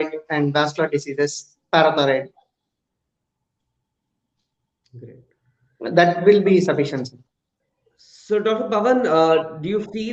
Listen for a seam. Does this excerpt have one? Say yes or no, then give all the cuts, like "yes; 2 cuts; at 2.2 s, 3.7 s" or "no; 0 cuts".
no; 0 cuts